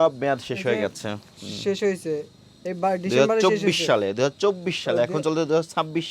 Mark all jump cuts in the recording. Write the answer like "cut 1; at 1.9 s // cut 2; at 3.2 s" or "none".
none